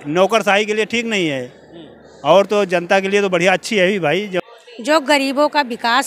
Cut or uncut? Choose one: cut